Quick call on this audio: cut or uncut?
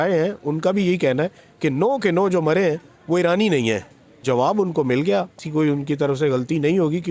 cut